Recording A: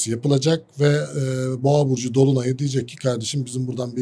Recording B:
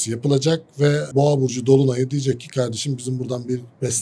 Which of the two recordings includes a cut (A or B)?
B